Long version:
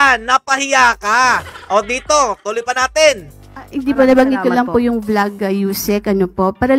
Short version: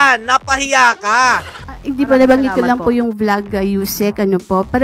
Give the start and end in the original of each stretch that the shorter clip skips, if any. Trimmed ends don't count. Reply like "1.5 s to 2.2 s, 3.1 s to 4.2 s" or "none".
1.5 s to 3.4 s